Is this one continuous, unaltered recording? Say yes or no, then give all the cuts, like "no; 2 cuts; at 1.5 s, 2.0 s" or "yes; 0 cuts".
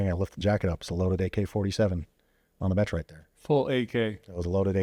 yes; 0 cuts